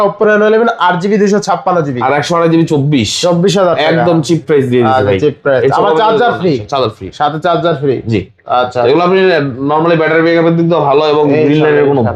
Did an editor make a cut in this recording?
no; 0 cuts

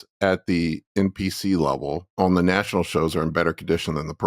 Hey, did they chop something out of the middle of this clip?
yes; 1 cut; at 2.1 s

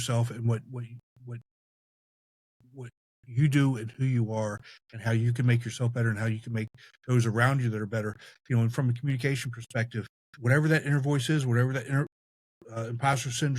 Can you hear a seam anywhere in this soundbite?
yes; 1 cut; at 10.2 s

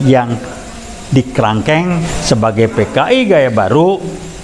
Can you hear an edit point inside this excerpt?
yes; 1 cut; at 2.1 s

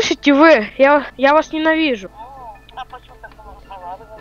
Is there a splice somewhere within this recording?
yes; 2 cuts; at 1.1 s, 2.1 s

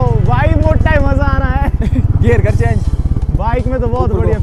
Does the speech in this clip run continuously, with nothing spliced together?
yes; 0 cuts

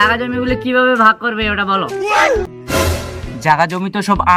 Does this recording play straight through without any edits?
no; 1 cut; at 2.5 s

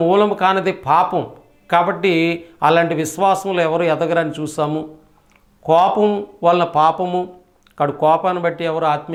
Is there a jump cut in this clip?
no; 0 cuts

